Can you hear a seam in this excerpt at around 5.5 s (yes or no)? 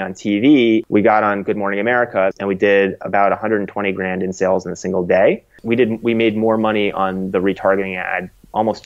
yes